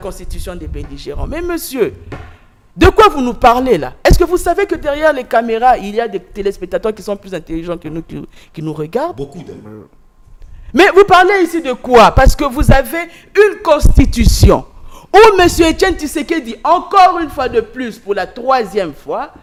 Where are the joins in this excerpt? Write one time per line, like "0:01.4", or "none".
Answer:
none

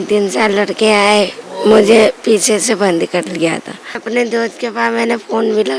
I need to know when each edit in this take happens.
0:04.0

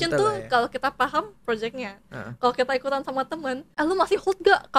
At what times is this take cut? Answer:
0:03.7

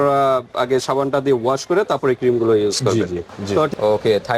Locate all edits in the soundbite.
0:03.4

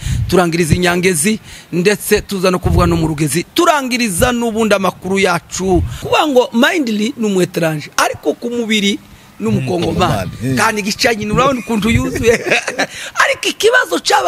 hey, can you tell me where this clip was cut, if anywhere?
0:06.0

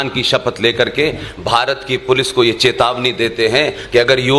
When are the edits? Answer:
none

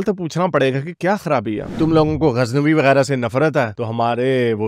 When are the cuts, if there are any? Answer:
0:01.7

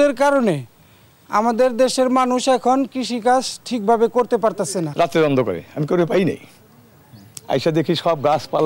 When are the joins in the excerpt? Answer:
0:04.9

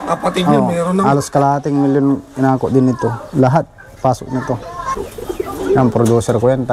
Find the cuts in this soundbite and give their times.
0:05.0

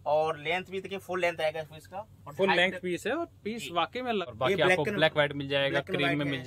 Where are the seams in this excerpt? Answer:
0:04.2

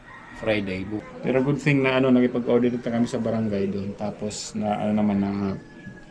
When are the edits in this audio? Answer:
0:01.1

